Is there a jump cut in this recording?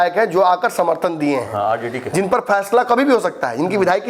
no; 0 cuts

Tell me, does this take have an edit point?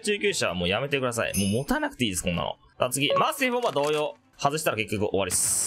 no; 0 cuts

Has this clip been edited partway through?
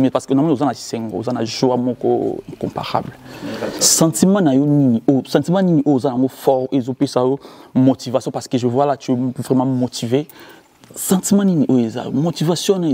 no; 0 cuts

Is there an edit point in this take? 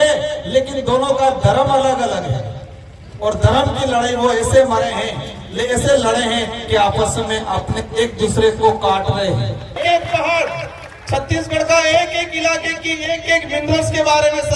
yes; 1 cut; at 9.8 s

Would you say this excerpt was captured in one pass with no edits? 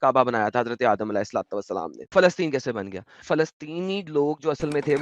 no; 2 cuts; at 2.1 s, 3.2 s

